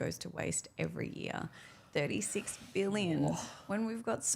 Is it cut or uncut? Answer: uncut